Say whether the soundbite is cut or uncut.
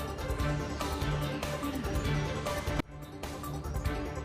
cut